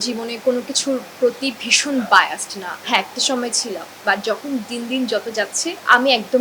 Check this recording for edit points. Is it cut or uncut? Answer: uncut